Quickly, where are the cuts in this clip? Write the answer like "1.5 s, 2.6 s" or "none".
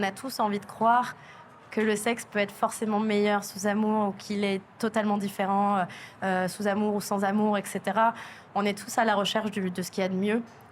none